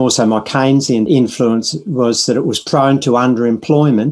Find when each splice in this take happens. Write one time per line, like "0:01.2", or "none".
0:01.1